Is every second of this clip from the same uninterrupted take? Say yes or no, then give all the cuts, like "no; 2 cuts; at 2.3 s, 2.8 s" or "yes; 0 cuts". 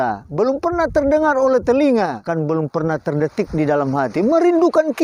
no; 1 cut; at 2.2 s